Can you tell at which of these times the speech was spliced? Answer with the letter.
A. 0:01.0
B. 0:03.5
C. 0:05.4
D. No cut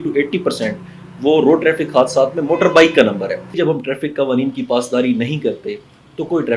B